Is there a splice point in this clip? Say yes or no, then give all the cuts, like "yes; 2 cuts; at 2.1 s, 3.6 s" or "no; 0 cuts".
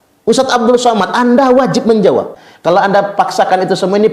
yes; 1 cut; at 2.3 s